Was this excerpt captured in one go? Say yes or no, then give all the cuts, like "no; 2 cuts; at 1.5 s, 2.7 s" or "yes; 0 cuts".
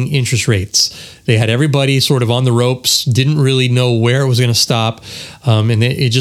yes; 0 cuts